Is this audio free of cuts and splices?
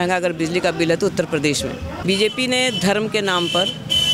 no; 1 cut; at 1.9 s

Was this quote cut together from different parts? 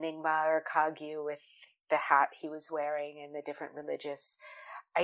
no; 0 cuts

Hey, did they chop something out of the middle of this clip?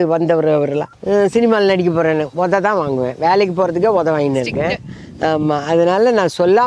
yes; 1 cut; at 0.9 s

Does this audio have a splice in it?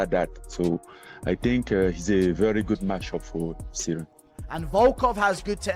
yes; 2 cuts; at 1.3 s, 4.3 s

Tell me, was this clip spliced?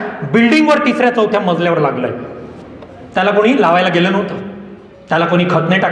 no; 0 cuts

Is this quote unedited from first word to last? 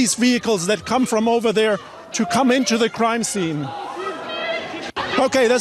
yes; 0 cuts

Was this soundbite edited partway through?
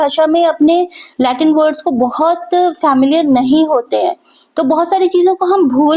no; 0 cuts

